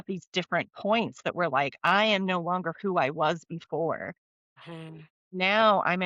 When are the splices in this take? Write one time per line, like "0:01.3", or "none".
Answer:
none